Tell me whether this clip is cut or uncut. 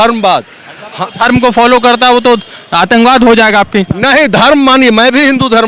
uncut